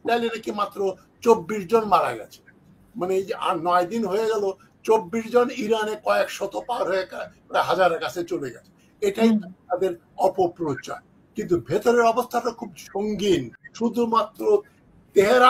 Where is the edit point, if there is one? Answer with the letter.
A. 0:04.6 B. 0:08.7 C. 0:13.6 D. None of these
C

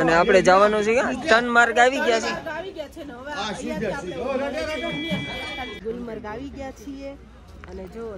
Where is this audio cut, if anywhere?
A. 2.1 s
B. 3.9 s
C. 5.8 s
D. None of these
C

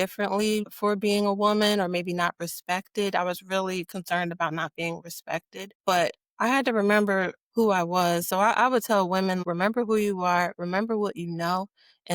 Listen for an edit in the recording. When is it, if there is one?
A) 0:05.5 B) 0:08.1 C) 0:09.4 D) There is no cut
C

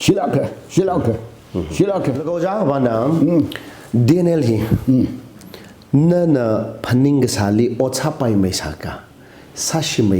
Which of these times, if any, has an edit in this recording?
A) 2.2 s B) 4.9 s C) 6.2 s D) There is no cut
A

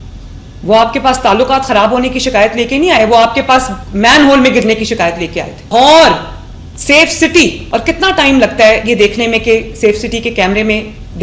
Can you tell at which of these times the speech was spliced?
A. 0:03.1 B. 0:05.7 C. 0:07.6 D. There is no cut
D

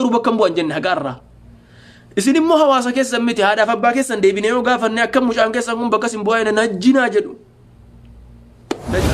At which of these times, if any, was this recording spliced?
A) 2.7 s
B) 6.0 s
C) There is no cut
C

